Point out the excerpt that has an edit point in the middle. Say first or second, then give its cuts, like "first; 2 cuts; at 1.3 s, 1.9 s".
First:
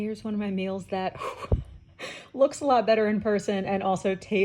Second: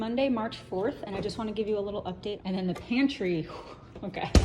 second; 1 cut; at 2.4 s